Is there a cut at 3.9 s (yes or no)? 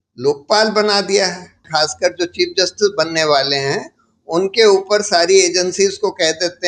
no